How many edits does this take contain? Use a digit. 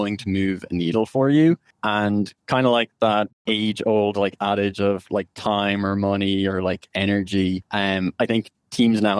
3